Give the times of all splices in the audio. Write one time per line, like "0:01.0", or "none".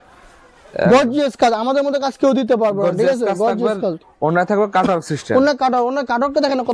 none